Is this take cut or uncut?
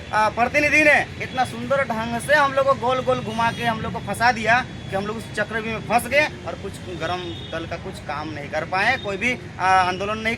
uncut